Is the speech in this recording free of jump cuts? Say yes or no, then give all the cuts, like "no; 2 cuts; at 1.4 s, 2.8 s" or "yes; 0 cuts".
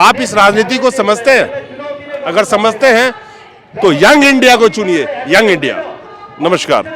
yes; 0 cuts